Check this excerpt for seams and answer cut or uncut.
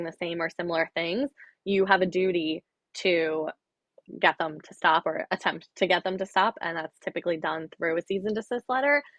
uncut